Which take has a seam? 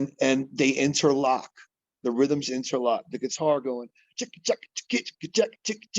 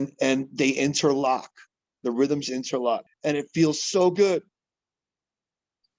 second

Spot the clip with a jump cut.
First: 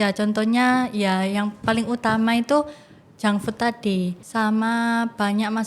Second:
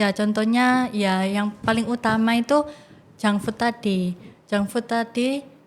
first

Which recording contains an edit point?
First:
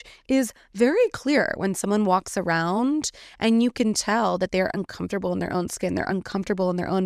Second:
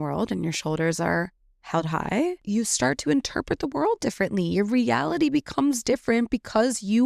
second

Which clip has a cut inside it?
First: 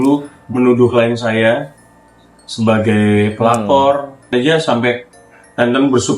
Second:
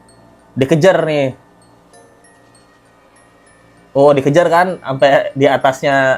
first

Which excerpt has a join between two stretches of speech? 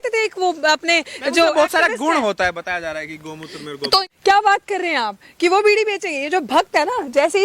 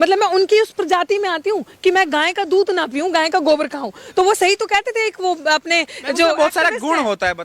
first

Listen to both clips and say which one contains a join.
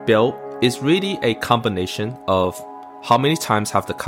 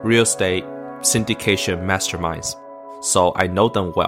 second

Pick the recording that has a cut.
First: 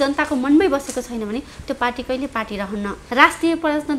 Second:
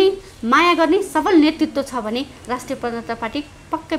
first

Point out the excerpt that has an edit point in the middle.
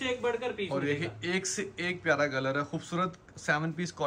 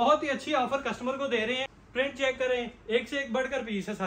second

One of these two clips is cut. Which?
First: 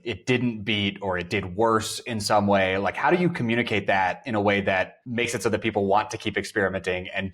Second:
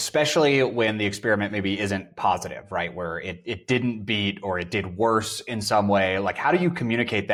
first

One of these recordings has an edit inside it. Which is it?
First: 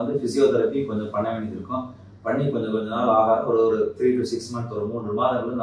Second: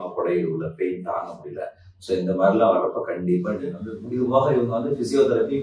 second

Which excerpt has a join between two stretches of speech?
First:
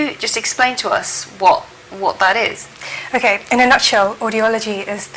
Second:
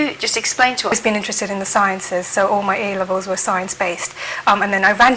first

